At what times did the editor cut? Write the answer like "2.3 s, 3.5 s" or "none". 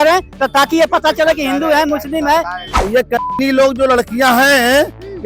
2.6 s